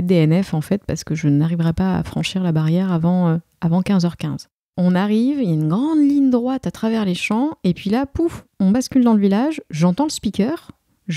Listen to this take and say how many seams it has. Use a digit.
1